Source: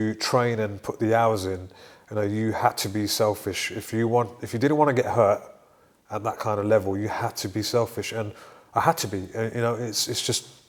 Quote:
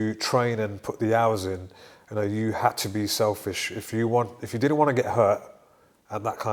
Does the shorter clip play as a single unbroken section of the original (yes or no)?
yes